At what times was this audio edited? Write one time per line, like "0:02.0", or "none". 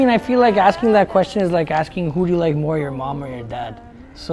none